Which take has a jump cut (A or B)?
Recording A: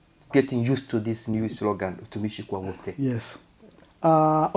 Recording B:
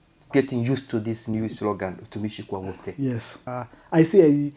B